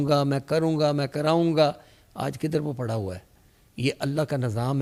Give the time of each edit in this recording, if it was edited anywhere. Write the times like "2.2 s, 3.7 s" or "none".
none